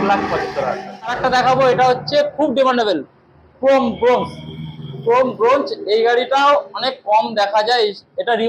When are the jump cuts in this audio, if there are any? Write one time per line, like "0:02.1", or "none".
0:01.2